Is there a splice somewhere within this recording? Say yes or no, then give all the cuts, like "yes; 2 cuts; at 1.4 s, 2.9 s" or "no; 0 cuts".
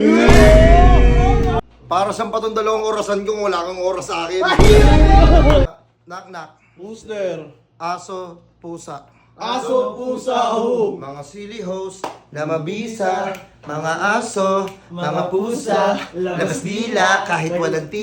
yes; 2 cuts; at 1.6 s, 5.7 s